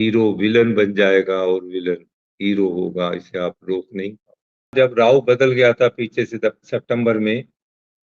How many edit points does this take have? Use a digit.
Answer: 1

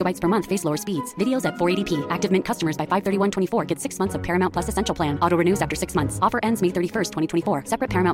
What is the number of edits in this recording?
0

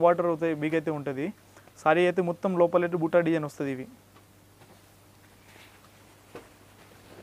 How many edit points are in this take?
0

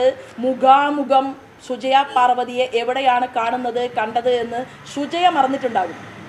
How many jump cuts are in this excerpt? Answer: 0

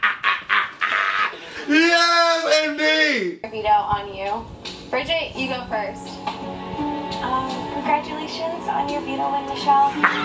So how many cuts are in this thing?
1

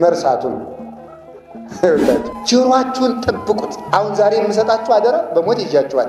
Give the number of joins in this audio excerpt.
1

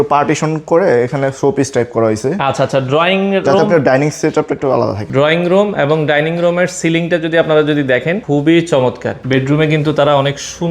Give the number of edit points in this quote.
3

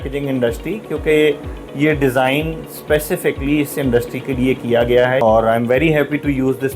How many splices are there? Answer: 1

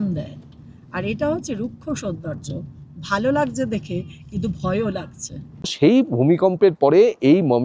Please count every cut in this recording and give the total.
1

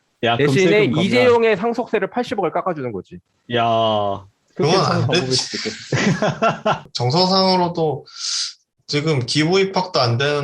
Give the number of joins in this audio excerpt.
1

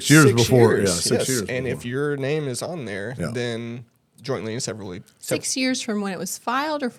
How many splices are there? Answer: 0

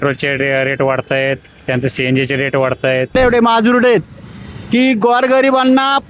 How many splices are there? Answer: 1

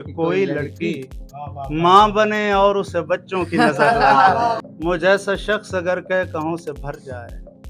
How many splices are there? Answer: 1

